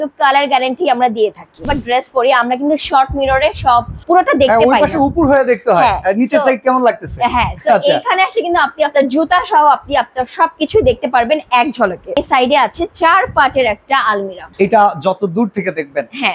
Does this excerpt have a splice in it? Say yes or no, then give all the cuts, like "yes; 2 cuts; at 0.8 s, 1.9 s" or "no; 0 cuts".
yes; 4 cuts; at 1.7 s, 3.9 s, 12.2 s, 14.5 s